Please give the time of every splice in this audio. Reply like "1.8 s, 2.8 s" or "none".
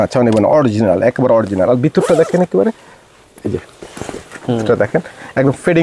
none